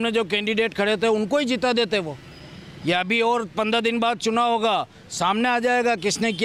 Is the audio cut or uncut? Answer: uncut